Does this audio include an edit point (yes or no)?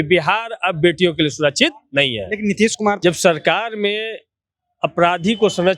yes